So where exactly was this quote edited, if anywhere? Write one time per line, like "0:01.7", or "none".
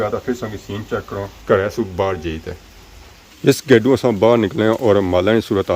none